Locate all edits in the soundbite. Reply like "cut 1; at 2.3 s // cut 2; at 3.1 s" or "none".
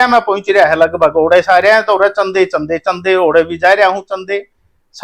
none